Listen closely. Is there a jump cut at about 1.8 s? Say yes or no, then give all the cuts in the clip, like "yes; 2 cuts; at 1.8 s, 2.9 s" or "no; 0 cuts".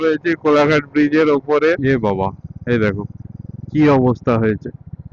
yes; 1 cut; at 1.8 s